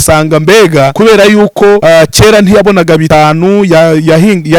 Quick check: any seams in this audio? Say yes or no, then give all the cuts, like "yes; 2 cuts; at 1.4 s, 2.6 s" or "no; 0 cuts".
yes; 3 cuts; at 0.9 s, 1.8 s, 3.0 s